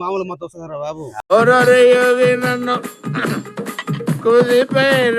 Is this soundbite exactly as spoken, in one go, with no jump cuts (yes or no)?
no